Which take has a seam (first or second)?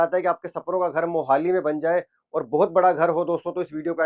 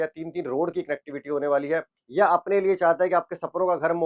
second